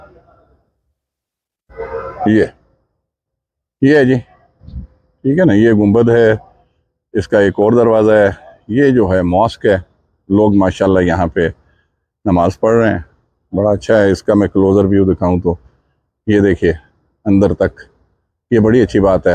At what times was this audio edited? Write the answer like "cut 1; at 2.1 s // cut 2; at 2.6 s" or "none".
none

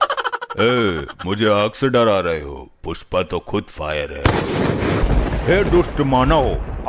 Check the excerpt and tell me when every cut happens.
cut 1; at 5.0 s

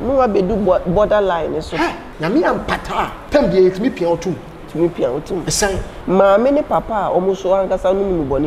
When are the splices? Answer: cut 1; at 2.1 s // cut 2; at 3.2 s // cut 3; at 5.9 s

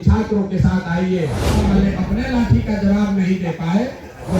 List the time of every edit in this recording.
cut 1; at 1.5 s

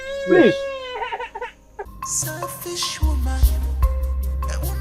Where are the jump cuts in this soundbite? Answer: cut 1; at 1.8 s

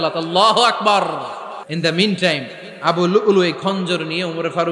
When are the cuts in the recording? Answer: cut 1; at 1.6 s

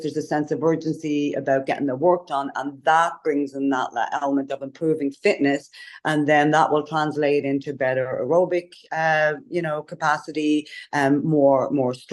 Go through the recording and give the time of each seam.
none

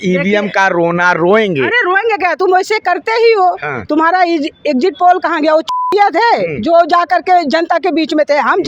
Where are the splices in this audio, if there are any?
none

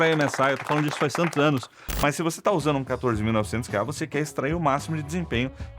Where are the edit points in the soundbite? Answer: cut 1; at 1.9 s

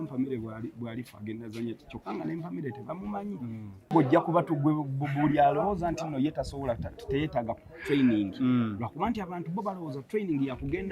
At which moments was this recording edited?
cut 1; at 3.9 s

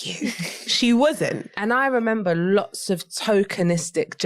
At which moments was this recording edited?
cut 1; at 1.5 s

